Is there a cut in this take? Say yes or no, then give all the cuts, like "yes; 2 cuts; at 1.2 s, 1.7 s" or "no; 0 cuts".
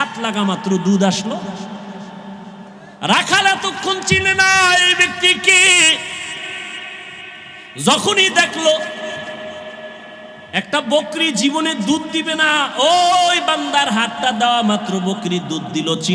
yes; 1 cut; at 2.8 s